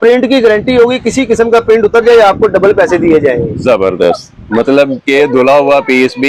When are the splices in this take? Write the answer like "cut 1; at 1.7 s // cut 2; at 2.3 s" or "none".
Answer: none